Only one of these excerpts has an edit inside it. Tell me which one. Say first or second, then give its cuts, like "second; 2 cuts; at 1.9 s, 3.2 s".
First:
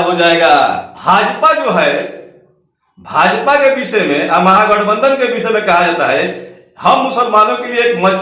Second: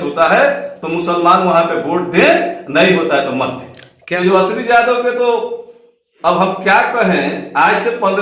first; 1 cut; at 0.9 s